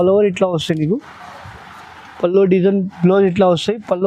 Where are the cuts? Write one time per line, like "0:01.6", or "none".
none